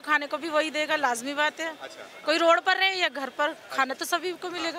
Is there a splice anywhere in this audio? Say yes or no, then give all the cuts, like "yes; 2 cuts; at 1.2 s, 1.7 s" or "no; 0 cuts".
no; 0 cuts